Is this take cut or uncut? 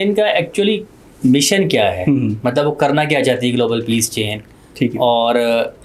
uncut